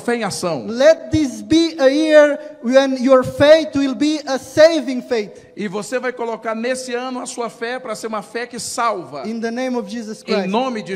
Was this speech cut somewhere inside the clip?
no; 0 cuts

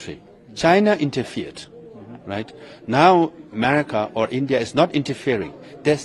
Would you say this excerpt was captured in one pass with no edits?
yes; 0 cuts

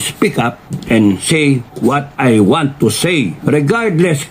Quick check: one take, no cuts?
no; 1 cut; at 3.4 s

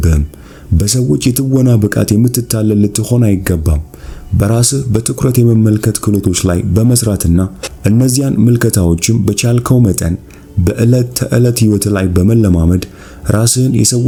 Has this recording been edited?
no; 0 cuts

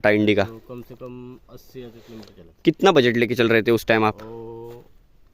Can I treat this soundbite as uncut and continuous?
yes; 0 cuts

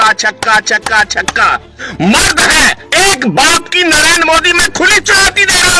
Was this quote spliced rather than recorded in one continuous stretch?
yes; 1 cut; at 1.8 s

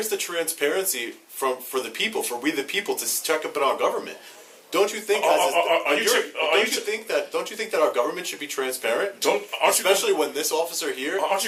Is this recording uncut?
yes; 0 cuts

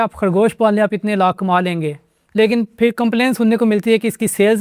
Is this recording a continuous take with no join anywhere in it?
yes; 0 cuts

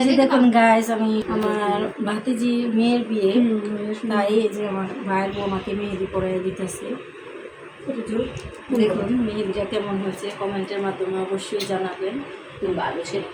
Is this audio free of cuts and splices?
no; 1 cut; at 1.2 s

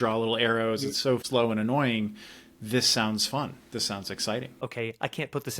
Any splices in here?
yes; 2 cuts; at 1.2 s, 4.5 s

